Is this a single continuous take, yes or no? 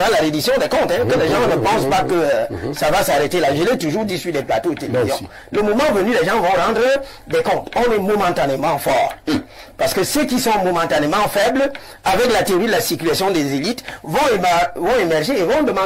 yes